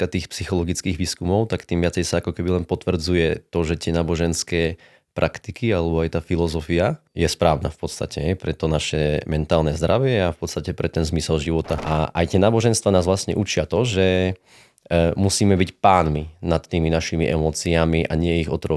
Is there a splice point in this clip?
yes; 2 cuts; at 7.1 s, 11.8 s

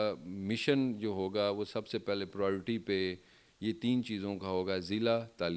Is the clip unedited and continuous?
yes; 0 cuts

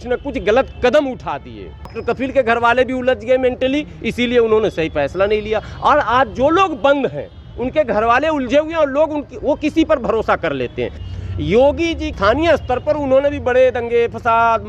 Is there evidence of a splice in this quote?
yes; 3 cuts; at 1.9 s, 11.0 s, 12.1 s

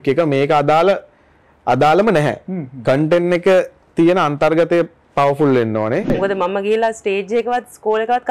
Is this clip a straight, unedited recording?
no; 1 cut; at 6.2 s

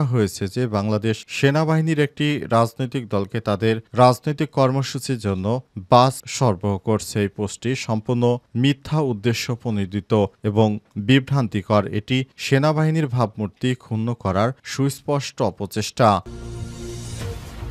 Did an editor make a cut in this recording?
yes; 1 cut; at 16.3 s

